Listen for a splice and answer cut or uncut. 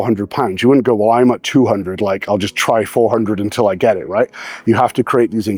uncut